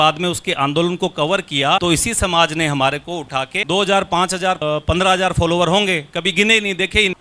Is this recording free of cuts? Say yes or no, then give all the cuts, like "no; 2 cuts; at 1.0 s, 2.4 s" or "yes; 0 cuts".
yes; 0 cuts